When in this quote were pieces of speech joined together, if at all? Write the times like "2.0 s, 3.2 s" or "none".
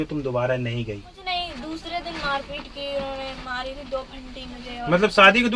1.2 s